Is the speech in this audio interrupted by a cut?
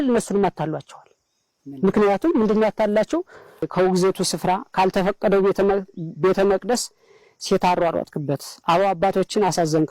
yes; 1 cut; at 3.7 s

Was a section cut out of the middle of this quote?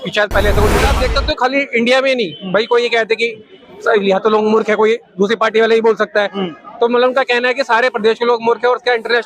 yes; 1 cut; at 0.9 s

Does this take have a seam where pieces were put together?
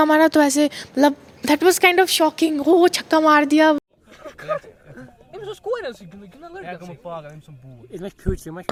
no; 0 cuts

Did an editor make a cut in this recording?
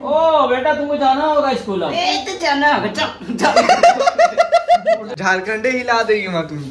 yes; 1 cut; at 5.1 s

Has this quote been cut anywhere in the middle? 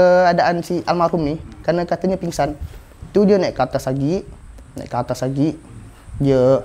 no; 0 cuts

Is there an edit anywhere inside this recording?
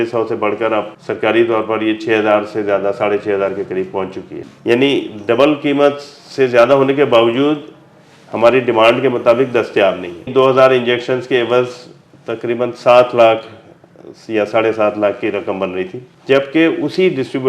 yes; 4 cuts; at 1.0 s, 4.4 s, 10.3 s, 16.1 s

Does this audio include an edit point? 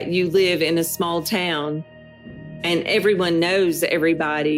yes; 1 cut; at 2.3 s

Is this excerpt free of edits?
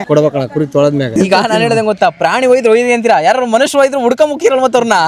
no; 1 cut; at 1.1 s

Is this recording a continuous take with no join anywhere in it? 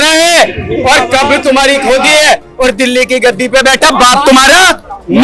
yes; 0 cuts

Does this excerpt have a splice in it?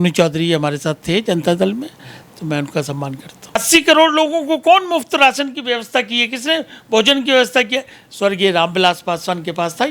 yes; 1 cut; at 3.6 s

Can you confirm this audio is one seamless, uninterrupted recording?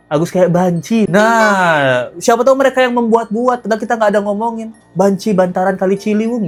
yes; 0 cuts

